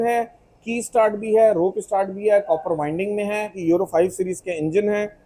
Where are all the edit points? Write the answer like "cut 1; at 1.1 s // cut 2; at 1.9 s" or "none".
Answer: cut 1; at 3.5 s